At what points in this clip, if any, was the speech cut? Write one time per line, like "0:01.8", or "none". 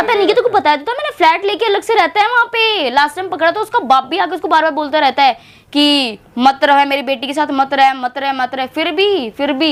none